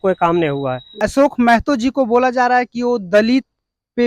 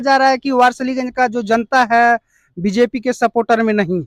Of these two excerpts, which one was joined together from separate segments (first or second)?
first